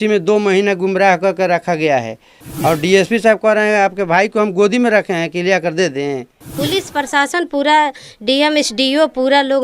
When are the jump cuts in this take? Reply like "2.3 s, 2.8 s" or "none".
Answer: 6.4 s